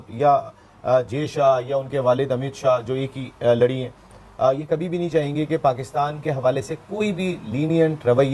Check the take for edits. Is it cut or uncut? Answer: uncut